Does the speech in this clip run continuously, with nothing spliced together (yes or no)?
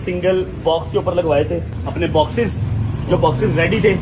no